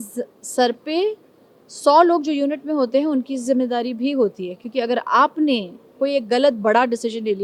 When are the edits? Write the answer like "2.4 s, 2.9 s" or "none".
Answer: none